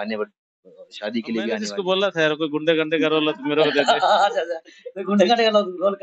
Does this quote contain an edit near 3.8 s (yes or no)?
no